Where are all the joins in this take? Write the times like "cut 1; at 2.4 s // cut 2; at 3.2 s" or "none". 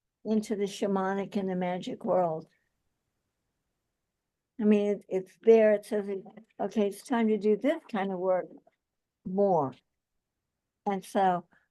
cut 1; at 5.0 s

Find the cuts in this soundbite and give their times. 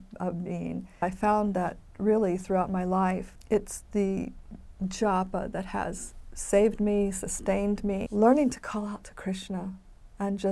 cut 1; at 1.0 s // cut 2; at 3.3 s // cut 3; at 8.1 s

